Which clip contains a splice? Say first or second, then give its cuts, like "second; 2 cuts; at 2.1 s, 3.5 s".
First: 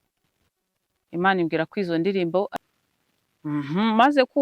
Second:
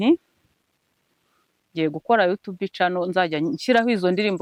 first; 1 cut; at 2.5 s